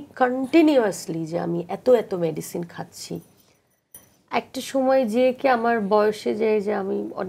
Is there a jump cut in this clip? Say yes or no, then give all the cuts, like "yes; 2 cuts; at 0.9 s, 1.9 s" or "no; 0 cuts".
no; 0 cuts